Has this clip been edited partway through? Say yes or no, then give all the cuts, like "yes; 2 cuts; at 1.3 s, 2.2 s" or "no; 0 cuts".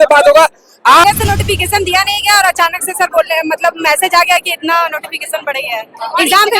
yes; 1 cut; at 1.0 s